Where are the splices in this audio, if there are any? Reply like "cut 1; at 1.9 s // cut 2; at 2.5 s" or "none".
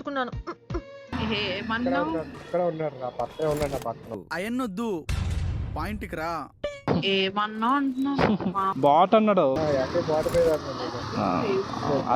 cut 1; at 1.0 s // cut 2; at 2.4 s // cut 3; at 4.1 s // cut 4; at 6.8 s // cut 5; at 8.7 s